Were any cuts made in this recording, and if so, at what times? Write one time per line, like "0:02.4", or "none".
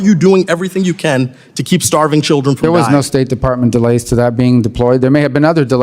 none